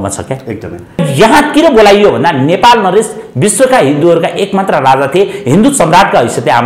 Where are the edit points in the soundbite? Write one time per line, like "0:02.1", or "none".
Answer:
0:01.1